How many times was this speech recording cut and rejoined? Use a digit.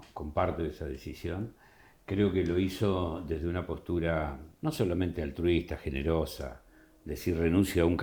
0